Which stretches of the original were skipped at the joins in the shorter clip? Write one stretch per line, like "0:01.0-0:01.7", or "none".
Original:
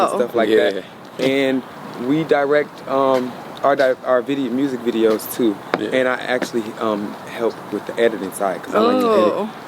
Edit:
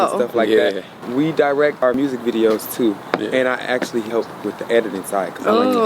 0:00.9-0:01.9
0:02.8-0:04.5
0:06.7-0:07.4